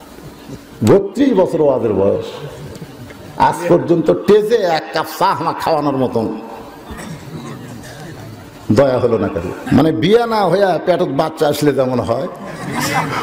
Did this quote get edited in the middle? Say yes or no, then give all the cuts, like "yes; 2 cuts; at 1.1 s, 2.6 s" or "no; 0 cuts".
yes; 1 cut; at 9.5 s